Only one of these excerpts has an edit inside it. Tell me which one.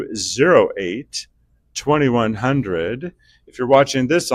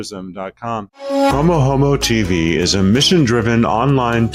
second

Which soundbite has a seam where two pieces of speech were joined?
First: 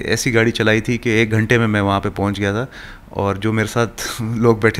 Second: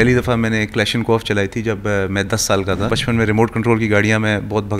second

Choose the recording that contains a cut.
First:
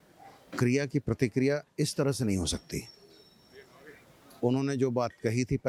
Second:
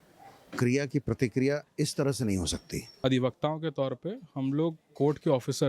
second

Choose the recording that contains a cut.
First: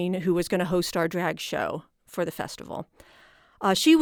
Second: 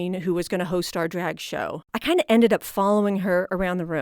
second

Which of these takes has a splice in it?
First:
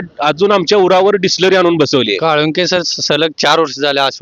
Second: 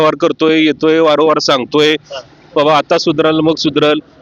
first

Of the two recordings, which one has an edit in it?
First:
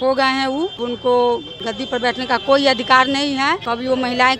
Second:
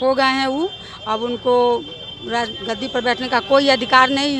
first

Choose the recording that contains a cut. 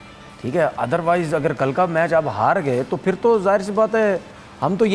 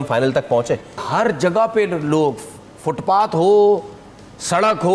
second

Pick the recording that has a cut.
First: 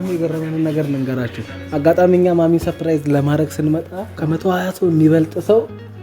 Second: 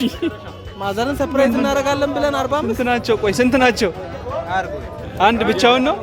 first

